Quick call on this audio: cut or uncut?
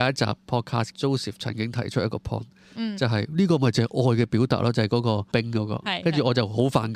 cut